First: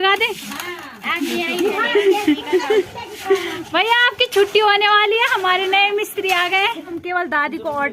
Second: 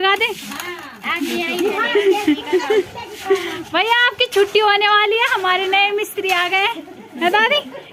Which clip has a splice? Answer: first; 1 cut; at 7.0 s

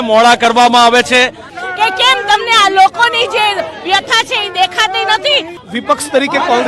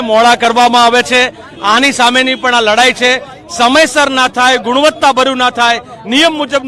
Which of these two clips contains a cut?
first; 2 cuts; at 1.5 s, 5.6 s

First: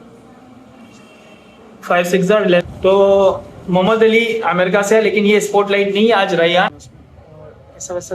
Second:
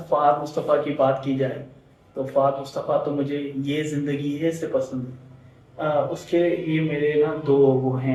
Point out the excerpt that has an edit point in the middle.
first; 2 cuts; at 2.6 s, 6.7 s

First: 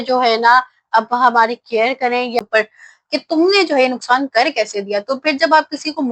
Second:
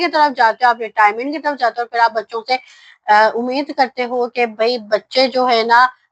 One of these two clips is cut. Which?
first; 1 cut; at 2.3 s

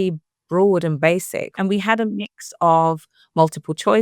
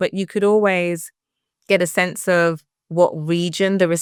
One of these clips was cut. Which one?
first; 1 cut; at 1.4 s

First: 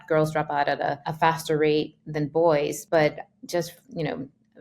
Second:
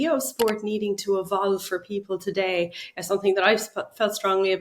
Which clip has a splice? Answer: first; 2 cuts; at 1.1 s, 2.8 s

